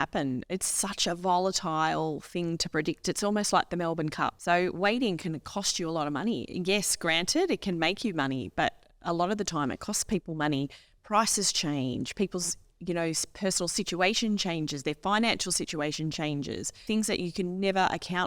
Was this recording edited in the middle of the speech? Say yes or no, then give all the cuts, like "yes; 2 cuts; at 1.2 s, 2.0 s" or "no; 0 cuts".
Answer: yes; 2 cuts; at 4.4 s, 16.8 s